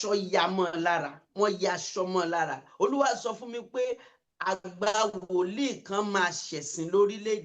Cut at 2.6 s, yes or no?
yes